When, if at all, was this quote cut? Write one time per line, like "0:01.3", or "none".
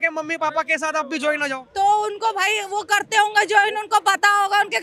none